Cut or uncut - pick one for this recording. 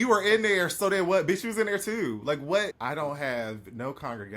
cut